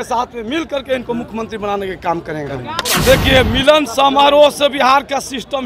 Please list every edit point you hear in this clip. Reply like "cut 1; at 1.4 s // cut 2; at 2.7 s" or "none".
cut 1; at 2.8 s